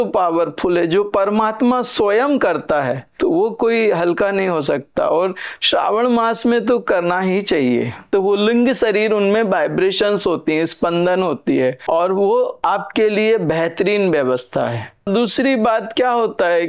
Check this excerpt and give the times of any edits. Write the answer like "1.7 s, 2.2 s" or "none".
8.0 s, 15.1 s